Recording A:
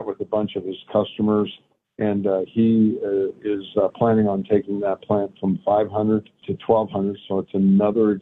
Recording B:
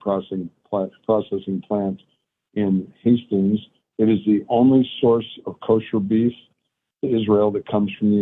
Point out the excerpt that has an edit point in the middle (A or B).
A